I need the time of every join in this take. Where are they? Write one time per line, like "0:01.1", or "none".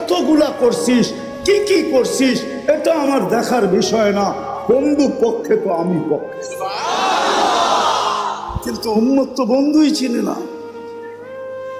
0:10.6